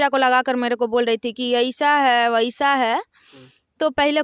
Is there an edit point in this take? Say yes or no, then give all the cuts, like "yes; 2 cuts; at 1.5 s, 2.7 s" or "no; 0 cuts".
no; 0 cuts